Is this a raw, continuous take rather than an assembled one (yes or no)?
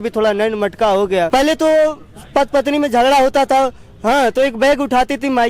no